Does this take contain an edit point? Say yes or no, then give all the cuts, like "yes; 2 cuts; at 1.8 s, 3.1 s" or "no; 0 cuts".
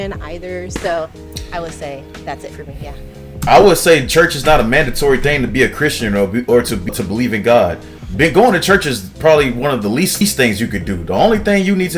yes; 2 cuts; at 6.9 s, 10.2 s